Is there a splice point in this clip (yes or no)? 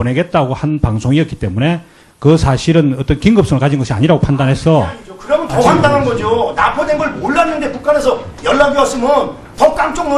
yes